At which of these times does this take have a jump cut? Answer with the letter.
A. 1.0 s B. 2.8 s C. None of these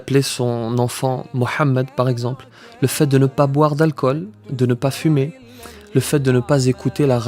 C